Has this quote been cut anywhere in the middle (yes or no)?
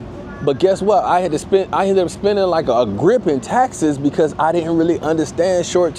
no